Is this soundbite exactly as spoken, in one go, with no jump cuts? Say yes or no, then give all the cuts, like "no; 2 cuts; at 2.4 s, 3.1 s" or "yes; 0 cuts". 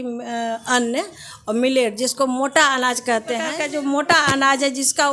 no; 1 cut; at 3.5 s